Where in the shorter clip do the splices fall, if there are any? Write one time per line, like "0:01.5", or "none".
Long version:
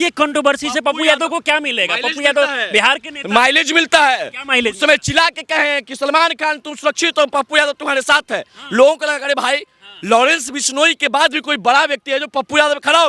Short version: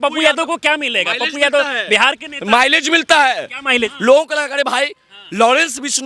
0:03.9